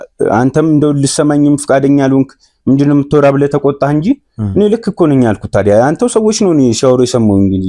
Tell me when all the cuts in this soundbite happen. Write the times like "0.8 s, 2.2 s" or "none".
none